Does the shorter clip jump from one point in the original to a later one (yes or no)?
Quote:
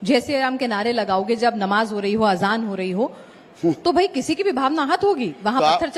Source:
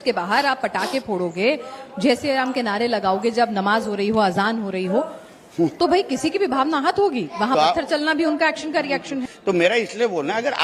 no